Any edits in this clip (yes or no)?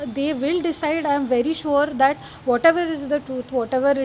no